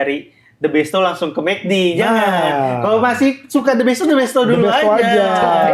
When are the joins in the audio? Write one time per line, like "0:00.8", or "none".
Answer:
none